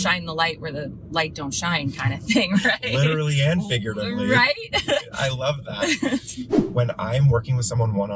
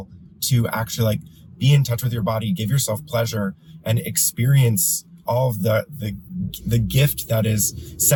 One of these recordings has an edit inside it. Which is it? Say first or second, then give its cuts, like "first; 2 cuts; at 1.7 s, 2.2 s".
first; 1 cut; at 6.6 s